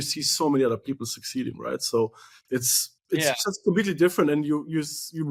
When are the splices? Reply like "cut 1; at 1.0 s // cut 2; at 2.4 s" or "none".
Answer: none